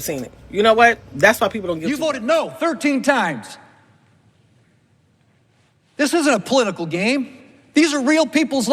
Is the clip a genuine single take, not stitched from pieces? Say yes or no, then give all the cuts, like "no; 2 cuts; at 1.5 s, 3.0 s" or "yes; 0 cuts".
no; 1 cut; at 1.9 s